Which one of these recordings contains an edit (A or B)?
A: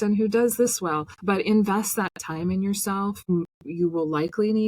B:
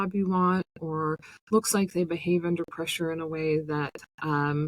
A